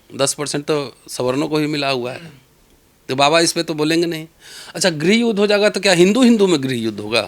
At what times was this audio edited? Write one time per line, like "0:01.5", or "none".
none